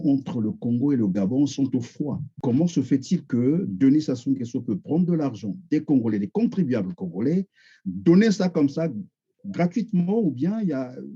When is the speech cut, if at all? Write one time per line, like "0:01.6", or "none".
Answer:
0:02.3